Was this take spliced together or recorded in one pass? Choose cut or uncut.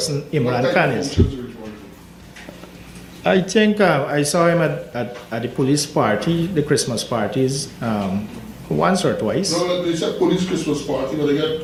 uncut